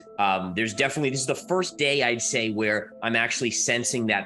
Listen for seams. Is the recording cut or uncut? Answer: uncut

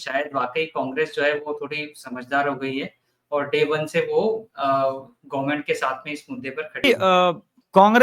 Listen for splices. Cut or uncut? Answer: cut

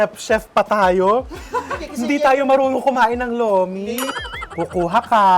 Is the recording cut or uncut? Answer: uncut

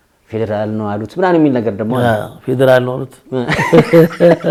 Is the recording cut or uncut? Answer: uncut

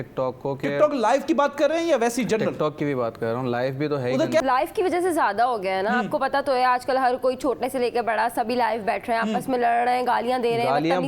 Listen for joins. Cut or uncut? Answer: cut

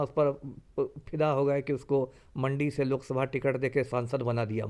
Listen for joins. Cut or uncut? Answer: uncut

